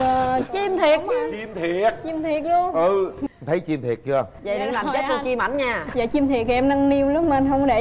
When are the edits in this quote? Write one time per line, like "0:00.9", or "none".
none